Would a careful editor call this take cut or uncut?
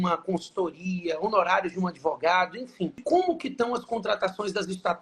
cut